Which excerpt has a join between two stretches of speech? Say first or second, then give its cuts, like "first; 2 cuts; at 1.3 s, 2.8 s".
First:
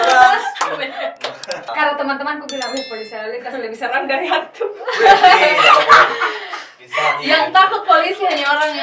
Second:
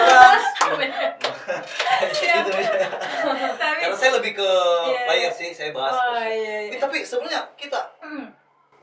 first; 1 cut; at 1.7 s